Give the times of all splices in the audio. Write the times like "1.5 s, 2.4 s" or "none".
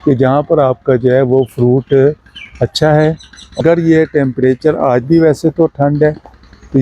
3.6 s